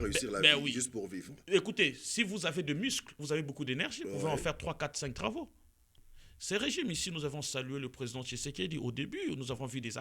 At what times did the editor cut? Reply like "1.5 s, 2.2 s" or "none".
5.9 s